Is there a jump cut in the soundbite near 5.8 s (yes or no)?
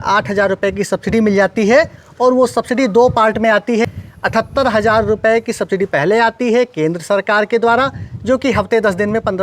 no